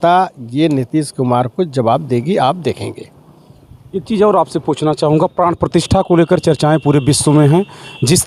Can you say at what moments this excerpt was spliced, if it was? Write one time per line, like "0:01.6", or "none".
none